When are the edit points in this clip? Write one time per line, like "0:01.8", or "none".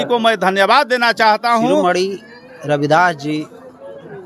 0:01.8